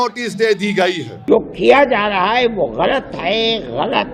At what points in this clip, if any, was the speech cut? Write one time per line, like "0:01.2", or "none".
0:01.1